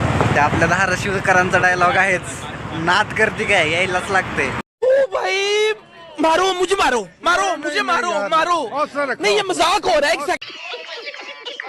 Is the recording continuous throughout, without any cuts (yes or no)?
no